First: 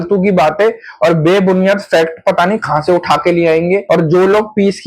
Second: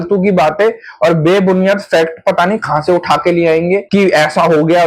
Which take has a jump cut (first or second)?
first